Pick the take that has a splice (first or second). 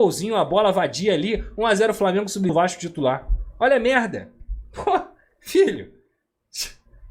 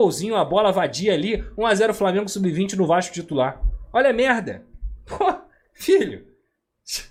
first